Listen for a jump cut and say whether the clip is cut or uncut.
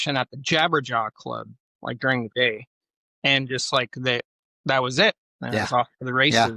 uncut